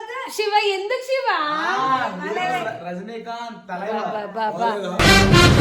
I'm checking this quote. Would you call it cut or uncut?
uncut